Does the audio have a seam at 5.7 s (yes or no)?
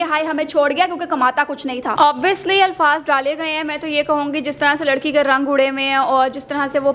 no